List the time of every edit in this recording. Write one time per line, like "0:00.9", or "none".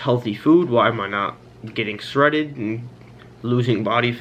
none